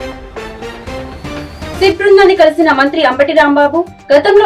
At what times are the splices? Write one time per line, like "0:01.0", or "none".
0:01.7